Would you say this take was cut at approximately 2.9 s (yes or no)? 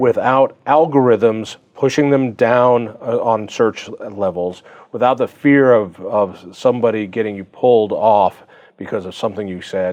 no